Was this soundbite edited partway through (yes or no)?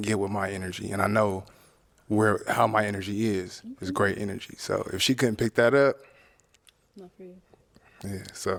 no